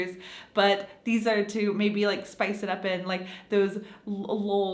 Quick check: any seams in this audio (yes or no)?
no